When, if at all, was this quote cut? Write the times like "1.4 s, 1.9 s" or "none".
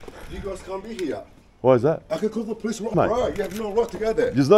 2.9 s